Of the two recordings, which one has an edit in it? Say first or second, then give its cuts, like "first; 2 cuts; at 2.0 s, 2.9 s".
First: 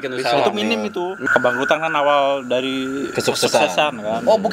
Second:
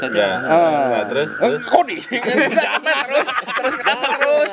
first; 1 cut; at 1.2 s